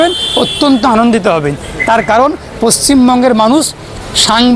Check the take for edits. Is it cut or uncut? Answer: uncut